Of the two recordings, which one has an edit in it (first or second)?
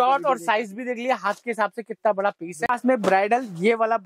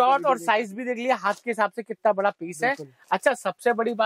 first